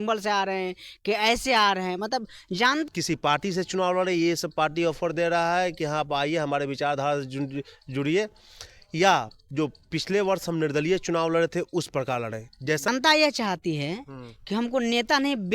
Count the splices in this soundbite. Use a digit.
2